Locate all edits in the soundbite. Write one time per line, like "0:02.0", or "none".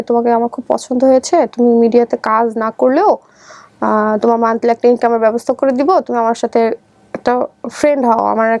none